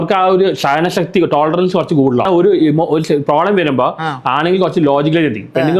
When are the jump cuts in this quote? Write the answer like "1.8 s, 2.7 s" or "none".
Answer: 2.3 s